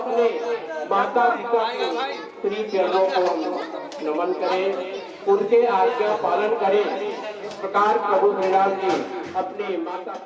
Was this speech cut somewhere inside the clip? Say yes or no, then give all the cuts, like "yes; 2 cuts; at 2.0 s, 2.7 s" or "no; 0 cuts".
no; 0 cuts